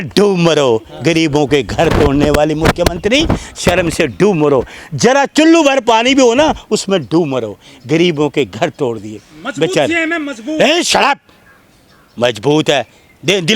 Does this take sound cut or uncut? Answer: uncut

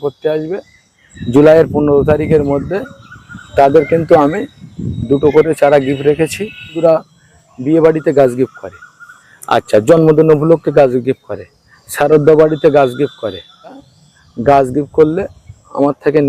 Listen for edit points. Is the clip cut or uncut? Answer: cut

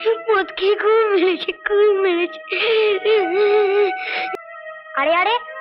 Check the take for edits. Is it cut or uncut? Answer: cut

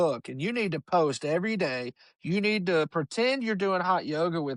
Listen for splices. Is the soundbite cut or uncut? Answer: uncut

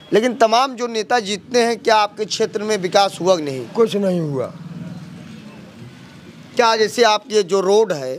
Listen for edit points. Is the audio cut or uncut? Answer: uncut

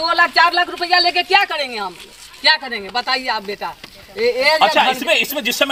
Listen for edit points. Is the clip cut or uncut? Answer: uncut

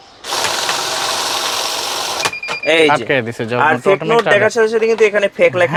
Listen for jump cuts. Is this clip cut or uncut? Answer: uncut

